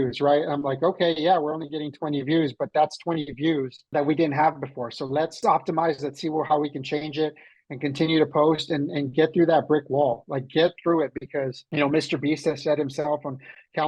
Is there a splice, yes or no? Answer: yes